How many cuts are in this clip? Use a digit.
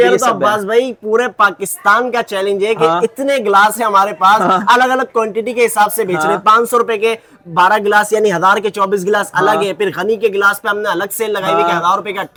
0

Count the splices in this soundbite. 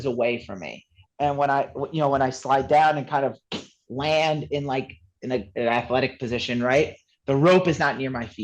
1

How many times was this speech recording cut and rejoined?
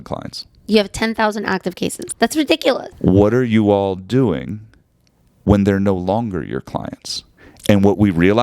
2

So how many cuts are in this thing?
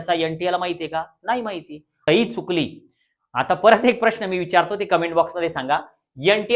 1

